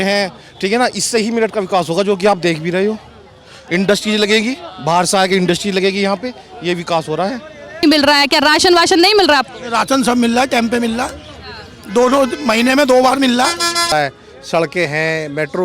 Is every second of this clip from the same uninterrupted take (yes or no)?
no